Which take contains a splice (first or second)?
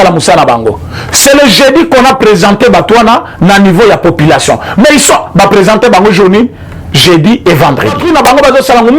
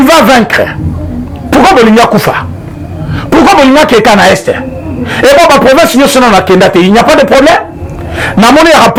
first